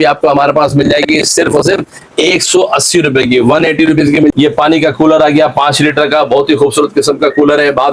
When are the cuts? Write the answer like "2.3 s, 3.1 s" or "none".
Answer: 4.3 s